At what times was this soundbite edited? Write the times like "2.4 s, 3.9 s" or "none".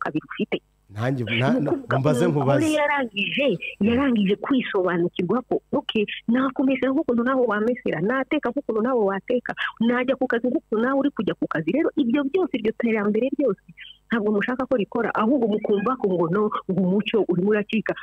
none